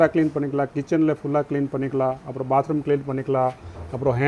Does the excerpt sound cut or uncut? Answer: uncut